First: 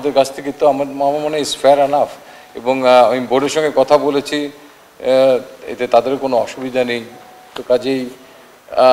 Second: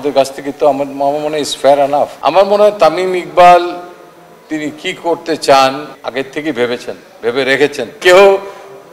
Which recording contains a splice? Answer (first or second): second